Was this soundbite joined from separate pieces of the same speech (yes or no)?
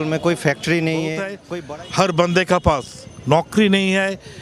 yes